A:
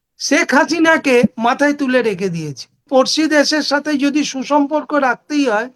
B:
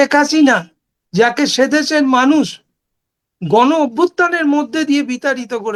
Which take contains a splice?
A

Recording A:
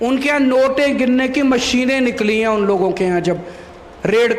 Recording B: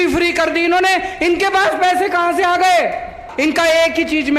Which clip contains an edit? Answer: B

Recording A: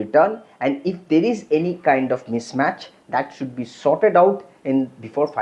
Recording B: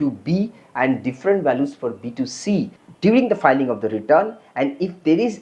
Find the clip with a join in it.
B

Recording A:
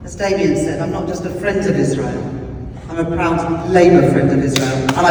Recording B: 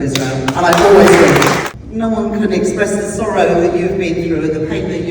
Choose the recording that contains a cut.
B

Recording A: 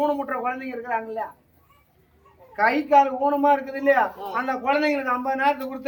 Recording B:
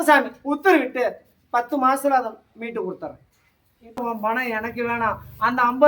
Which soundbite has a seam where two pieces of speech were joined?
B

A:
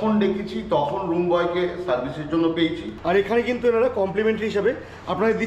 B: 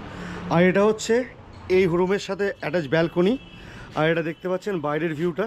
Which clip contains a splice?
A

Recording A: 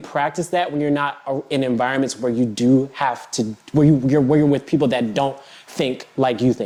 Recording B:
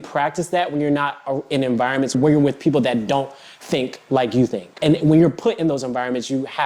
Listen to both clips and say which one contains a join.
B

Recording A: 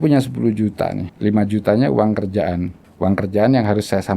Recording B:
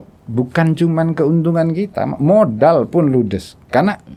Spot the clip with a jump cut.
A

